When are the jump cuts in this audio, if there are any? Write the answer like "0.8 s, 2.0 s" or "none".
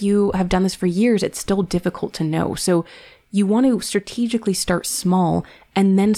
none